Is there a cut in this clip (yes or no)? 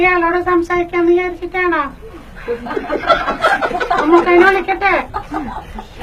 yes